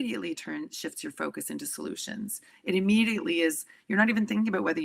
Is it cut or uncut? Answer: uncut